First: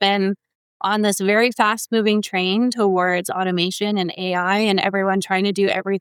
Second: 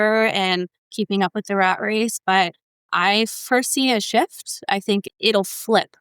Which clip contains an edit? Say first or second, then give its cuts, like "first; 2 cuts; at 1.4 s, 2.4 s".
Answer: second; 1 cut; at 5.1 s